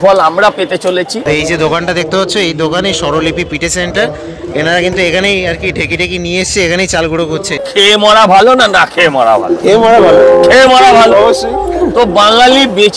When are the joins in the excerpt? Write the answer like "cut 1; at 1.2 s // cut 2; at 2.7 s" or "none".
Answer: cut 1; at 1.2 s // cut 2; at 7.6 s